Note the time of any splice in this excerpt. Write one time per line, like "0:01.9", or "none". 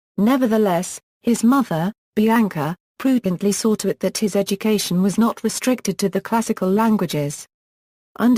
0:03.8